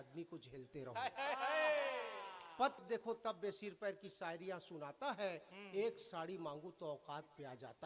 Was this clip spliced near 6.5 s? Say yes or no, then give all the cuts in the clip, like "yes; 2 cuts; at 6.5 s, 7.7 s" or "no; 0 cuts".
no; 1 cut; at 2.8 s